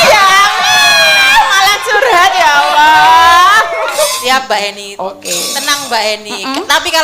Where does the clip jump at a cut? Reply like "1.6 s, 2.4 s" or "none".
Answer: 4.2 s